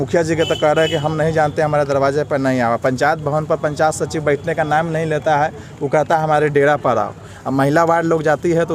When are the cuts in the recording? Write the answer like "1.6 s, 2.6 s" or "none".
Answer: none